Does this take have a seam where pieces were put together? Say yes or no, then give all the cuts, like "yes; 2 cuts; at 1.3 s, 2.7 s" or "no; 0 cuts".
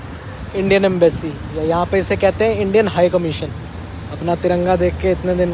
no; 0 cuts